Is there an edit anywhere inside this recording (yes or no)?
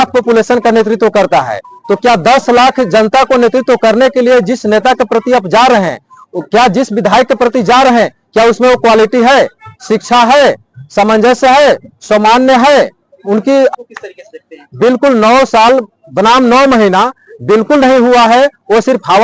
yes